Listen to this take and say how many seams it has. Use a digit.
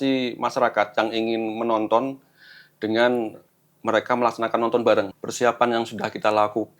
1